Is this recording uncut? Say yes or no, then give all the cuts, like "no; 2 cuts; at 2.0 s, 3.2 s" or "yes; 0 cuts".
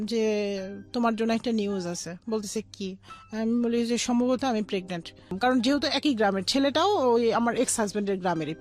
no; 1 cut; at 5.4 s